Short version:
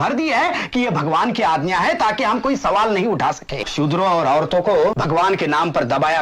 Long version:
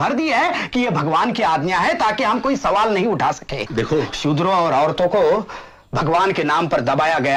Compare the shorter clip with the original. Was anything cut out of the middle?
yes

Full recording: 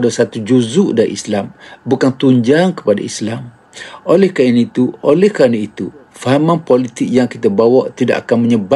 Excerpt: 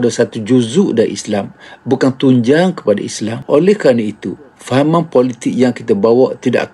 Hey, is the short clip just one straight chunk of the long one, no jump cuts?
no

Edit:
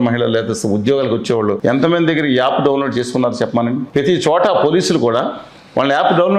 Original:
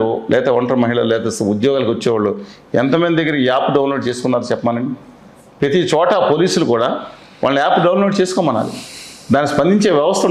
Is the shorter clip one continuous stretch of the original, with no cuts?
no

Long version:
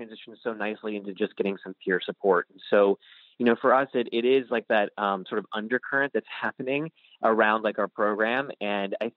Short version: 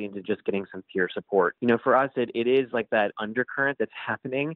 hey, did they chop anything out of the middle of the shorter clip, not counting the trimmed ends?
yes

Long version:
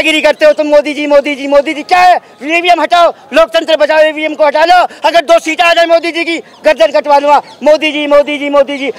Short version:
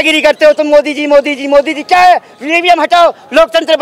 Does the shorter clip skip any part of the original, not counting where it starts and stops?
no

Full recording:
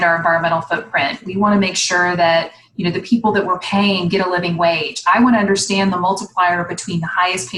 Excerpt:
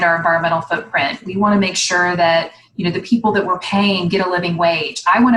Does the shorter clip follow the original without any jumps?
yes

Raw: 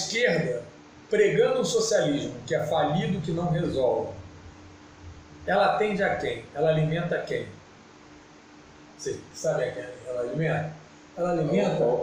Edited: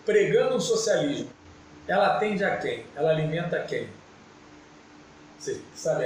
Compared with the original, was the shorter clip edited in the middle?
yes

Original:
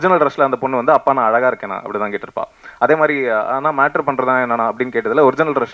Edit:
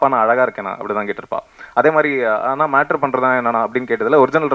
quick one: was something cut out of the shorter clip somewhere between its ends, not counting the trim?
no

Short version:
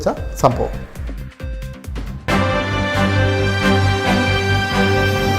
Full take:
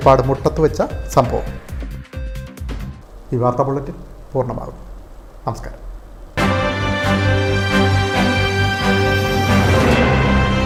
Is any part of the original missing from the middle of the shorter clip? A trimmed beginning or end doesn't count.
yes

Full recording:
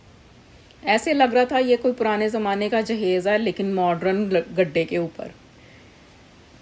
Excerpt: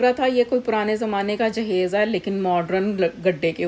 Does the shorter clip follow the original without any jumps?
yes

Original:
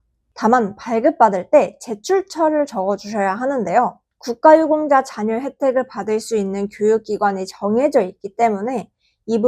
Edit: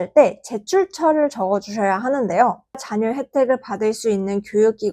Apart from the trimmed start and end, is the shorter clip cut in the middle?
yes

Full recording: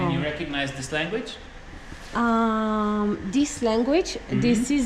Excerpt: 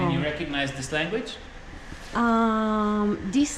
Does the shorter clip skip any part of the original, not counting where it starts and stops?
no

